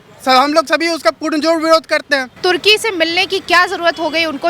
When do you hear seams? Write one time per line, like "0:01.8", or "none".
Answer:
0:02.3